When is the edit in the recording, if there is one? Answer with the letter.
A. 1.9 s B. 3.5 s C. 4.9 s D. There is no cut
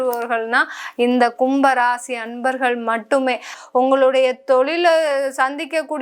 B